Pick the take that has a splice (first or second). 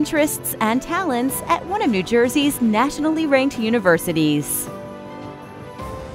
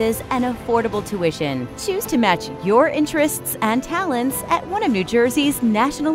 first